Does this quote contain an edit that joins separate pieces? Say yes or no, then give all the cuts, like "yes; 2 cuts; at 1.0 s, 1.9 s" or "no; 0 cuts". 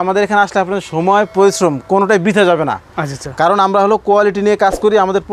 no; 0 cuts